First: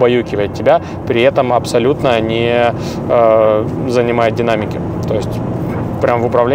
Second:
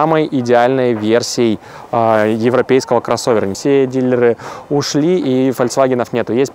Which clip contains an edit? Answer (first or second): second